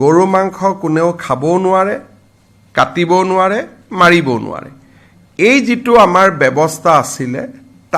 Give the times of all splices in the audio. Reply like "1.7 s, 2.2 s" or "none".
none